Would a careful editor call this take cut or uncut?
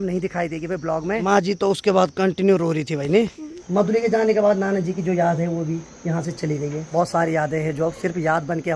cut